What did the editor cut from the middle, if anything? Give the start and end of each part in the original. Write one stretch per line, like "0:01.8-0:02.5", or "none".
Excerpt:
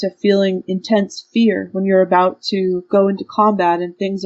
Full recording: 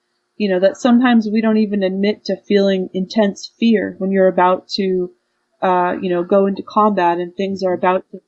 0:05.1-0:06.2